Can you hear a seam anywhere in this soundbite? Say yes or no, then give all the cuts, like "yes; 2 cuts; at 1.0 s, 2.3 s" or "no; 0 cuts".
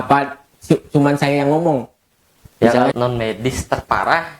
yes; 1 cut; at 2.9 s